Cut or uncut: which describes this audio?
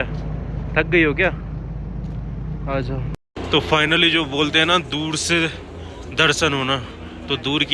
cut